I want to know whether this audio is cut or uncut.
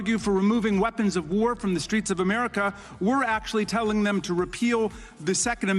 uncut